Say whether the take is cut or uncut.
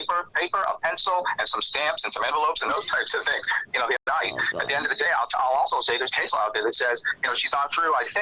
cut